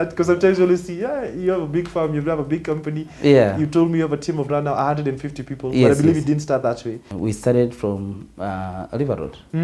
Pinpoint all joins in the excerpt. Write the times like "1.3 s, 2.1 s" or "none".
7.1 s